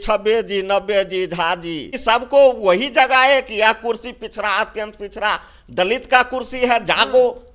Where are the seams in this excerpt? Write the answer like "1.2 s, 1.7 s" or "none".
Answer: 2.0 s